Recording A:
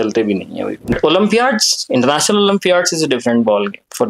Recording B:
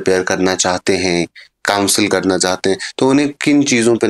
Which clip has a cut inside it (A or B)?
A